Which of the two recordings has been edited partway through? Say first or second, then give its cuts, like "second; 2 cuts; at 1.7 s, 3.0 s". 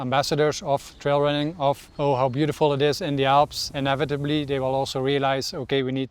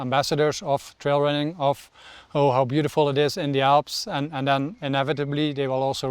first; 2 cuts; at 1.9 s, 3.7 s